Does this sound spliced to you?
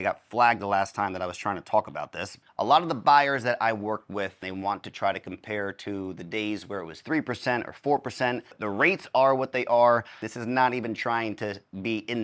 yes; 4 cuts; at 2.4 s, 4.4 s, 8.5 s, 10.3 s

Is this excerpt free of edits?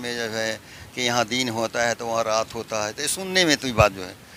yes; 0 cuts

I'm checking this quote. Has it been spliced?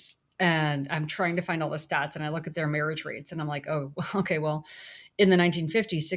no; 0 cuts

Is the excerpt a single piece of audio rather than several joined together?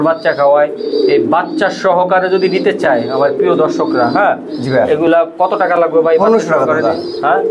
yes; 0 cuts

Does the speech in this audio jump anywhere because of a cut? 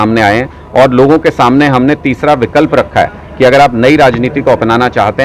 no; 0 cuts

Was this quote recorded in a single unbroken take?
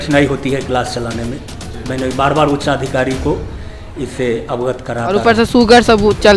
no; 1 cut; at 5.2 s

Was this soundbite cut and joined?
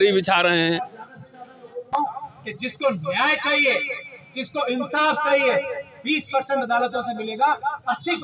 yes; 1 cut; at 1.9 s

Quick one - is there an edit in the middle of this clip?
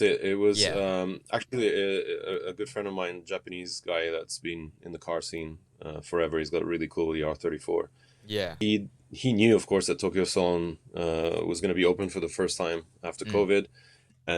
yes; 1 cut; at 8.5 s

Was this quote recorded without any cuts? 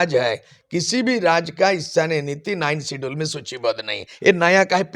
yes; 0 cuts

